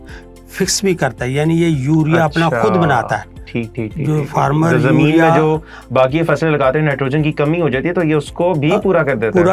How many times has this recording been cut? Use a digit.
0